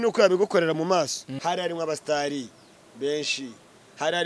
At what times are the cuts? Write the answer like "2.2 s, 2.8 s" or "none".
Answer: 1.2 s